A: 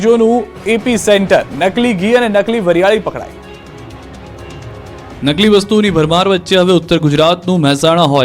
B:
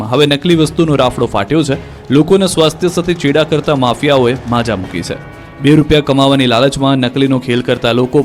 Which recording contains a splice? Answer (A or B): B